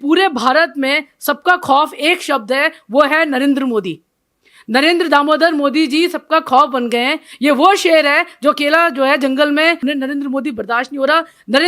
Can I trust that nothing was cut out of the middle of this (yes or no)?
no